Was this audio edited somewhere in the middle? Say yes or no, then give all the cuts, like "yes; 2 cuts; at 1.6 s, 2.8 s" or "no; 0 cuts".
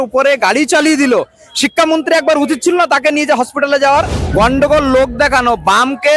yes; 1 cut; at 4.2 s